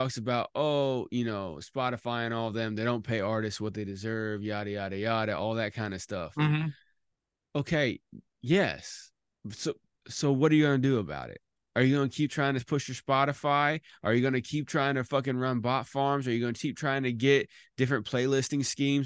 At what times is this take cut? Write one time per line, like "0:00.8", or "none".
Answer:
none

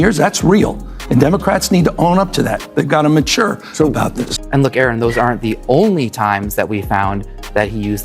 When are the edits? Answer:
0:04.1

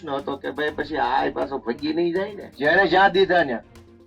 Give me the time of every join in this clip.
0:02.4

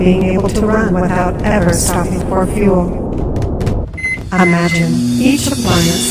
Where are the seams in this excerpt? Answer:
none

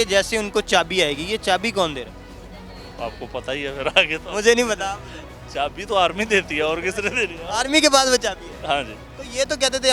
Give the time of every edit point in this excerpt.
none

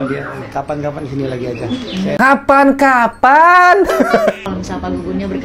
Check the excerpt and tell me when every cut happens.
0:04.4

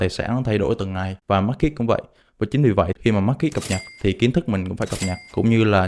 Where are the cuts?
0:01.1
0:03.8

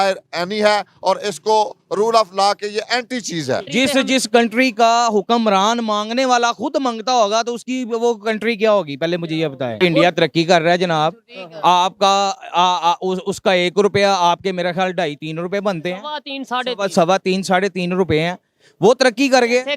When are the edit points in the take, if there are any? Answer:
0:03.7
0:09.8

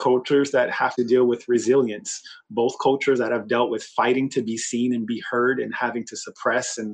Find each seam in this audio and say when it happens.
0:00.9

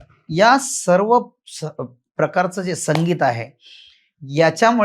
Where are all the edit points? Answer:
none

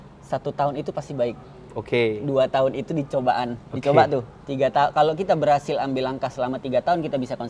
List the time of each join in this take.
none

